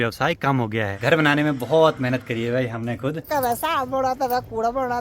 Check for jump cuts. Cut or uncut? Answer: cut